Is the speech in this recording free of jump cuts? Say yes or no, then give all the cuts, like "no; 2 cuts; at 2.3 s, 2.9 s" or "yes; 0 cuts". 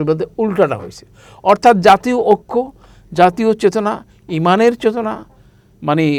yes; 0 cuts